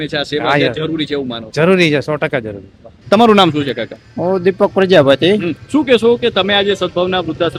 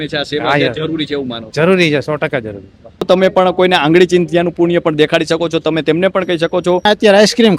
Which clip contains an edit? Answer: second; 2 cuts; at 3.0 s, 6.8 s

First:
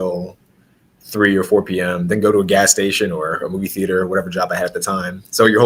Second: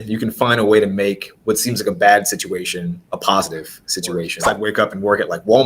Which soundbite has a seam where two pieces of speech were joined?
second; 2 cuts; at 3.1 s, 4.4 s

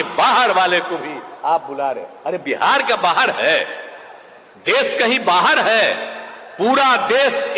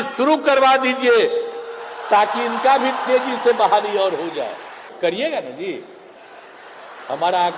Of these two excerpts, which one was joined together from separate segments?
second; 1 cut; at 4.9 s

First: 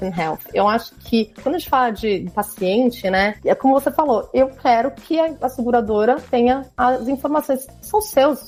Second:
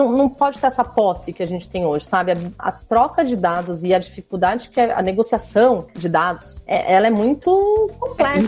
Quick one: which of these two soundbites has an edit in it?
second; 1 cut; at 2.6 s

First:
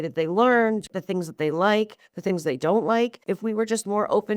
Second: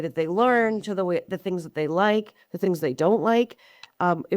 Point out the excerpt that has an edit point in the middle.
first; 2 cuts; at 0.9 s, 3.2 s

